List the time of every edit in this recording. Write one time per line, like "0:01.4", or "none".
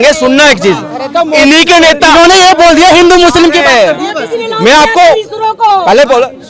none